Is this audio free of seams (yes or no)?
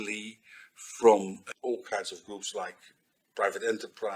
no